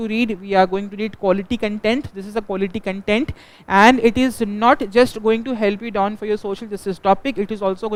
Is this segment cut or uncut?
uncut